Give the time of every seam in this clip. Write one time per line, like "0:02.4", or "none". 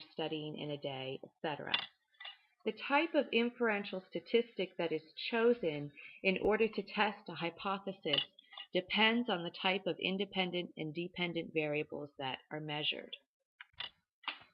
0:10.1